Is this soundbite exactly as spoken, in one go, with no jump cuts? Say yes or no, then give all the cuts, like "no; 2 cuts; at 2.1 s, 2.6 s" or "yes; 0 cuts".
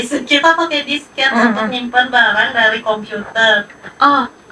yes; 0 cuts